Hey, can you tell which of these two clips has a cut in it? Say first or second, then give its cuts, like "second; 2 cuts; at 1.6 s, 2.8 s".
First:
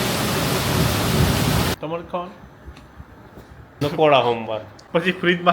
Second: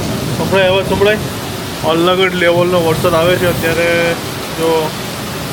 first; 2 cuts; at 1.8 s, 3.7 s